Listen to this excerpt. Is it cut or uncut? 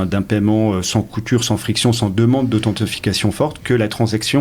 uncut